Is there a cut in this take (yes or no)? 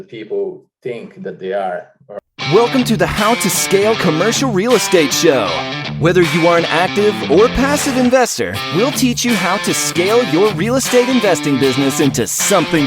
yes